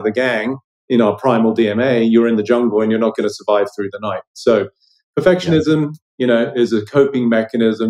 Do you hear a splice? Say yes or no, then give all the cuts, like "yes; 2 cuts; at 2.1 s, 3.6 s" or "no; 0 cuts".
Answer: no; 0 cuts